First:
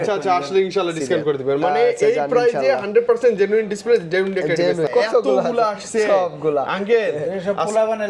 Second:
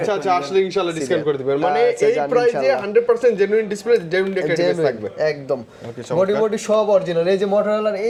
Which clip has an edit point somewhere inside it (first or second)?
first